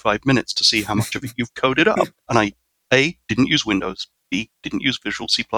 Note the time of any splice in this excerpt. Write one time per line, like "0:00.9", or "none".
0:02.2
0:04.1